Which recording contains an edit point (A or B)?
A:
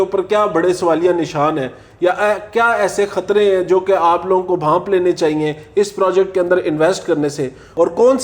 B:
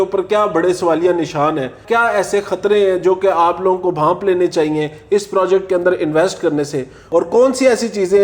B